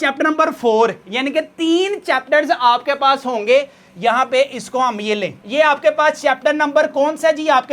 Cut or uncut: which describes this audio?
uncut